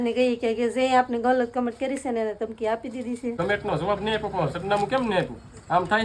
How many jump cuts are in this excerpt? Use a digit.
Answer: 1